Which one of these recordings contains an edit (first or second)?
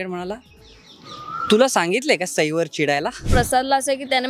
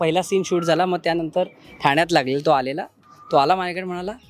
first